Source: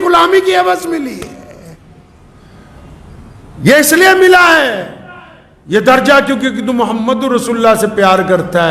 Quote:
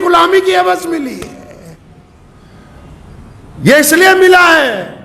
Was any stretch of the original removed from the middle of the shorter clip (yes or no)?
no